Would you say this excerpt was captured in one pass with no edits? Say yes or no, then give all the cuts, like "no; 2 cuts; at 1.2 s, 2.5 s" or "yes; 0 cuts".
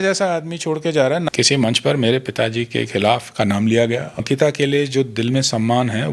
no; 2 cuts; at 1.2 s, 4.2 s